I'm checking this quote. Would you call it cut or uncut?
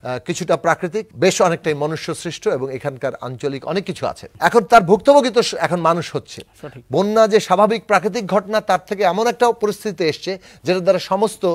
cut